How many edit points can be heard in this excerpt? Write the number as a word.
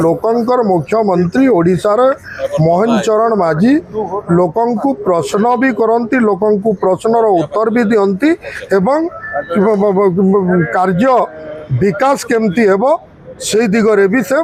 zero